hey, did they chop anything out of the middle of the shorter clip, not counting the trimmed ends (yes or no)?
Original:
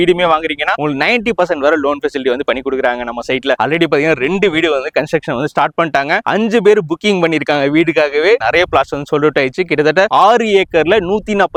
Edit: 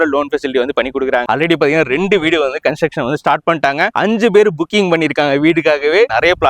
yes